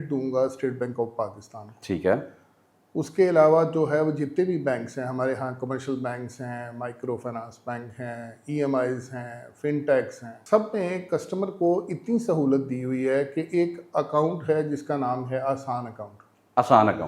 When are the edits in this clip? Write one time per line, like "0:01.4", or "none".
none